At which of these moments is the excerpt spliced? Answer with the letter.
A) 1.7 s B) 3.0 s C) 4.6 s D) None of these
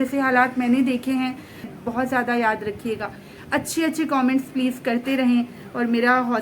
A